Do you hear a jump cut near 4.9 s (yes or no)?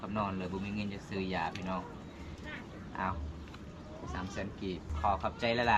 yes